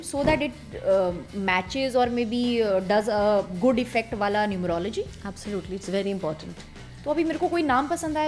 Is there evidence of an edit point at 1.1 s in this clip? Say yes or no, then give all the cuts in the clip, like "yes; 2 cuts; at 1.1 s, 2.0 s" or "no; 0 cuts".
no; 0 cuts